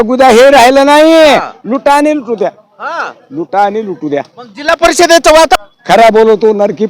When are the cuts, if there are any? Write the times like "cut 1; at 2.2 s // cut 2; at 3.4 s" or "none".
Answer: cut 1; at 5.6 s